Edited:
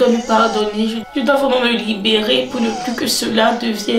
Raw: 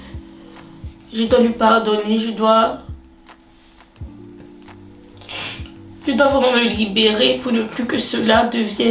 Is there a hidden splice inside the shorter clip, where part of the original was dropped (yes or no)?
yes